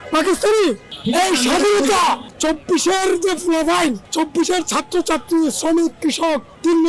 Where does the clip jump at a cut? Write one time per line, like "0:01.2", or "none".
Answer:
0:00.9
0:02.3
0:04.0